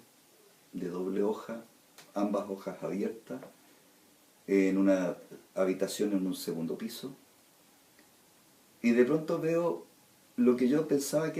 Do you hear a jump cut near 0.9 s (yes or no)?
no